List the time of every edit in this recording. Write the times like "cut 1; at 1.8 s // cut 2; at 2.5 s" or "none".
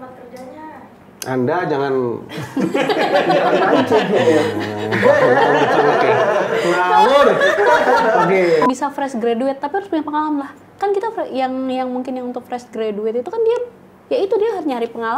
cut 1; at 1.0 s // cut 2; at 8.7 s